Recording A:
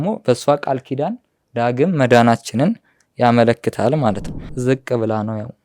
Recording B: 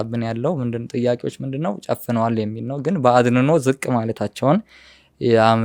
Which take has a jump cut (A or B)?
A